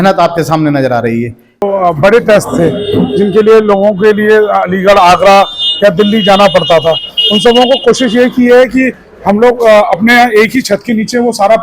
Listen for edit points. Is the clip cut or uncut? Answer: cut